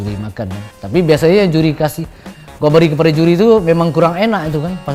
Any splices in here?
no; 0 cuts

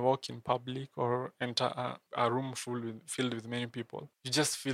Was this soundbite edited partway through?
no; 0 cuts

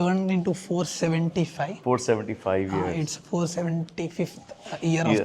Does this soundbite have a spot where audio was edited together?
no; 0 cuts

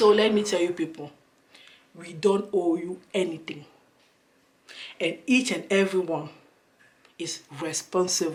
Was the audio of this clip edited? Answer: no; 0 cuts

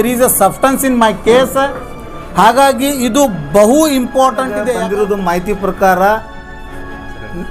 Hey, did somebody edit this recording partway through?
yes; 1 cut; at 4.7 s

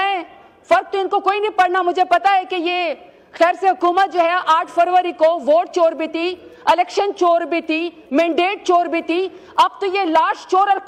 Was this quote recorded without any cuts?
yes; 0 cuts

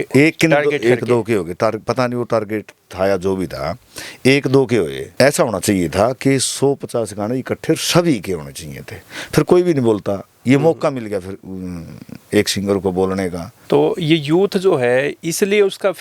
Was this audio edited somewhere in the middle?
yes; 2 cuts; at 5.0 s, 13.5 s

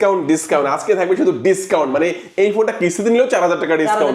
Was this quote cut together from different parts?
no; 0 cuts

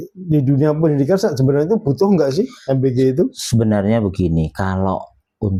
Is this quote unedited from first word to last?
yes; 0 cuts

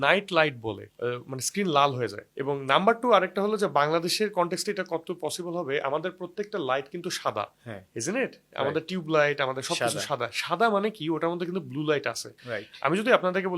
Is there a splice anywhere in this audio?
no; 0 cuts

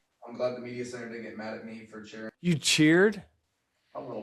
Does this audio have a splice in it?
yes; 1 cut; at 2.4 s

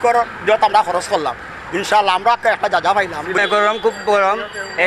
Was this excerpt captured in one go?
yes; 0 cuts

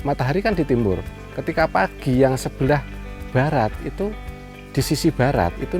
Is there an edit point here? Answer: no; 0 cuts

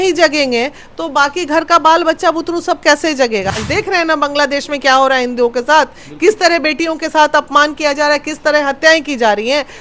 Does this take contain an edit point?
yes; 1 cut; at 3.6 s

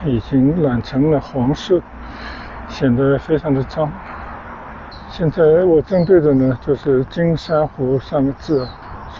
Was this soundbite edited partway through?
yes; 1 cut; at 5.0 s

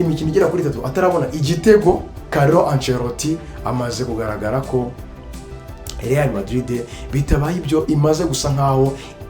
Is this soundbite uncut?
no; 1 cut; at 2.2 s

